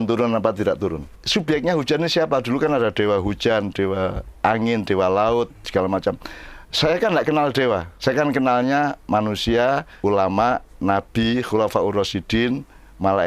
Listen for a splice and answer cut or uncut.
cut